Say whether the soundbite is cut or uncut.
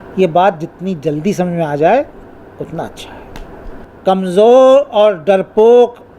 cut